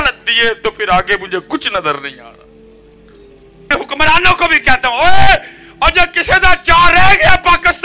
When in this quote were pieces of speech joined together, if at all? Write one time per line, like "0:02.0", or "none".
0:03.7